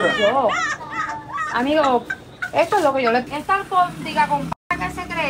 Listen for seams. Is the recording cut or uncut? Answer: cut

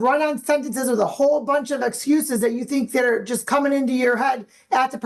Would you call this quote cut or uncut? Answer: uncut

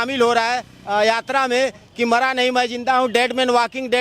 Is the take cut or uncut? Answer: uncut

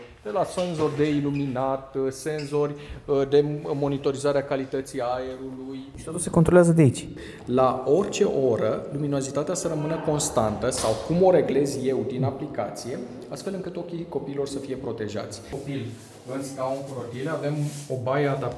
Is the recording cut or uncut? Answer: cut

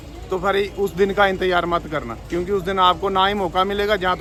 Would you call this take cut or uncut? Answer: uncut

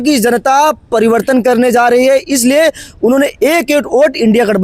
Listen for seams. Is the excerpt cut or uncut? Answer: uncut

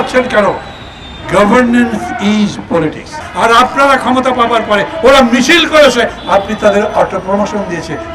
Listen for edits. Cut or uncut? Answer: cut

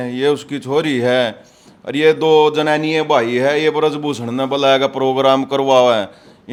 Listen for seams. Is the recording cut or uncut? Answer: uncut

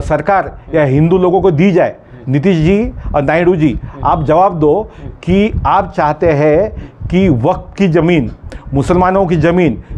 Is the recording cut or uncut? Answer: uncut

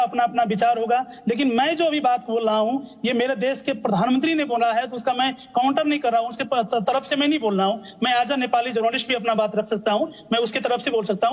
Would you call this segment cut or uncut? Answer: uncut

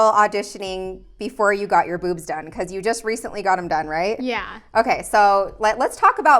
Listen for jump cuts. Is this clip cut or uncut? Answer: uncut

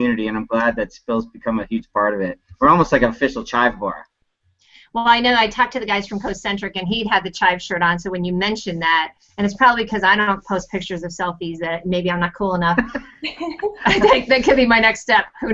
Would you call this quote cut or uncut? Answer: uncut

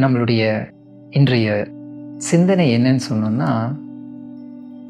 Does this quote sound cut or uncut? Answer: uncut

